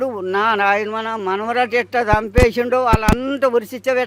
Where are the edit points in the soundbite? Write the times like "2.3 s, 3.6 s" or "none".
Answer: none